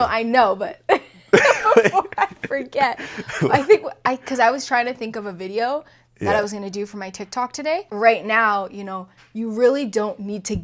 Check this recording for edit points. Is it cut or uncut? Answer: cut